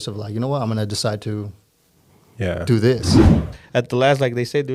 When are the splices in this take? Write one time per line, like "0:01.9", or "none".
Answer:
0:03.5